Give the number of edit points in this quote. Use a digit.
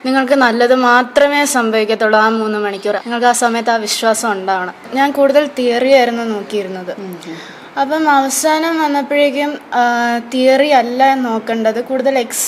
2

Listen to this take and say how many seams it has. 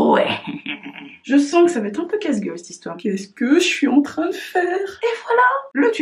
3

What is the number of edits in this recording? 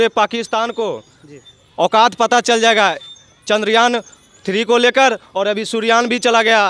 0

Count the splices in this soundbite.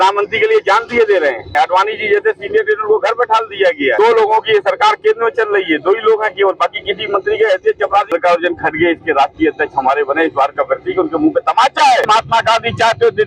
4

